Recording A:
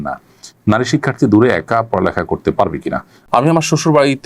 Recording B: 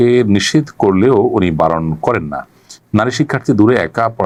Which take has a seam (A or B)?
A